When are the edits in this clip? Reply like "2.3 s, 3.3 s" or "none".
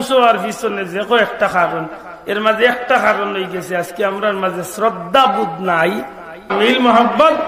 6.5 s